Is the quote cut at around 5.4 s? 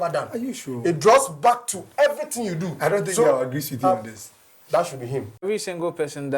yes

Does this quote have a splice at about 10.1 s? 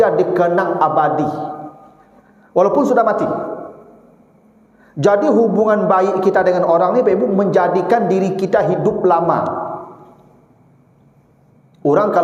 no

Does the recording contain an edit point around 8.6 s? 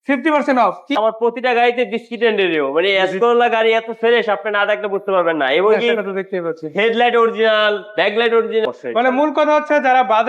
yes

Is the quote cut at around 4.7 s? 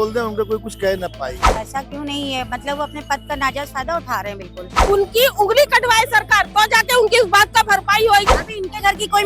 yes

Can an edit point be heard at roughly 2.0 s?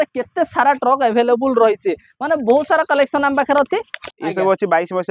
no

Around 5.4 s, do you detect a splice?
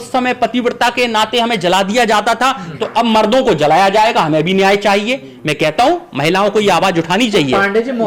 no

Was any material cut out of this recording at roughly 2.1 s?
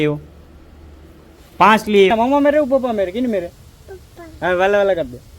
yes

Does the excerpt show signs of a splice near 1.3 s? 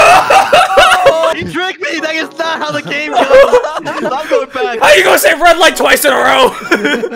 yes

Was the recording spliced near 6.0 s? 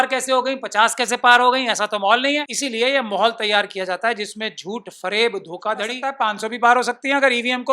yes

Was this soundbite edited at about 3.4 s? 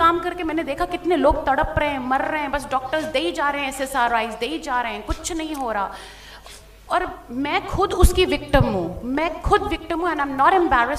no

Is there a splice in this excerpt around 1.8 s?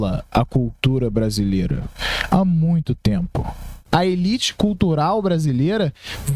no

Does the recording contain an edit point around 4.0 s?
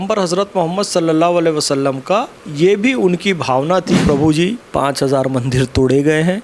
yes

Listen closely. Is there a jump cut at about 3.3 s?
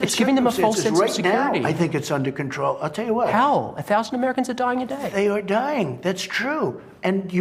yes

